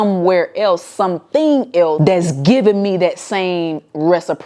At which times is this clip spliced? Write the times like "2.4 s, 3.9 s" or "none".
2.0 s